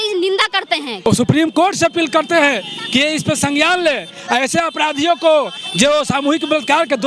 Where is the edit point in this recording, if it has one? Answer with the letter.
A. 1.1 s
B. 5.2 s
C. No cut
A